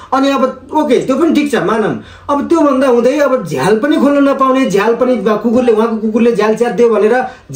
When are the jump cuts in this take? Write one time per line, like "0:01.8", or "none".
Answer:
none